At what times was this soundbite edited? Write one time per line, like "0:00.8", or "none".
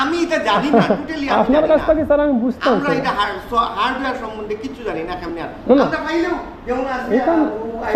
none